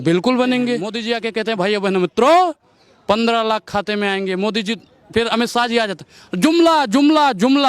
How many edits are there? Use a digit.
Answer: 1